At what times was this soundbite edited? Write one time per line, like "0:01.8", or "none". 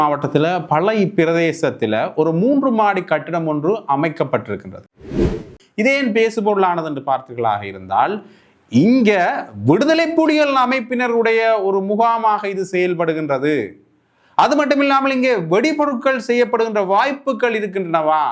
0:05.3